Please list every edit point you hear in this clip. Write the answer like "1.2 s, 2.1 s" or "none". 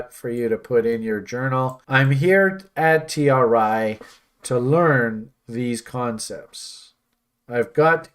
1.8 s